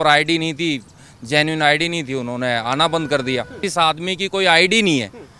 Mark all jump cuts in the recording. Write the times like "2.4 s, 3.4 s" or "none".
3.6 s